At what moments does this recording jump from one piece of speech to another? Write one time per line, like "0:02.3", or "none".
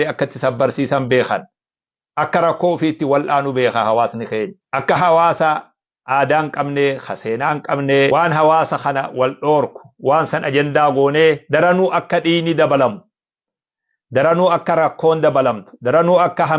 0:04.6
0:08.1

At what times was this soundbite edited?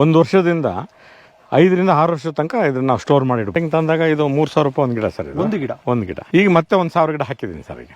0:03.5
0:06.2

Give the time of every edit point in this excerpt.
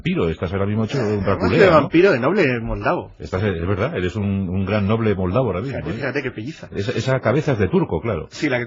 0:04.4

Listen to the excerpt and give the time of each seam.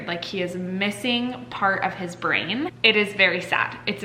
0:02.7

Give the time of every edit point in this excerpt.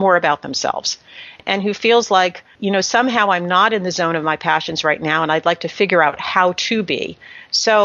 0:01.4
0:02.5

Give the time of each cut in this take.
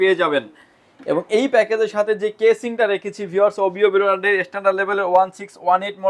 none

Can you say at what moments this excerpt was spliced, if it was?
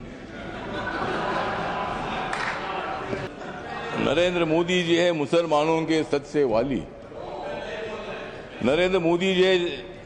0:03.3

